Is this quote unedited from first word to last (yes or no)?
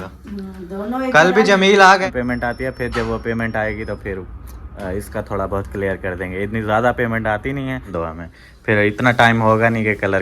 no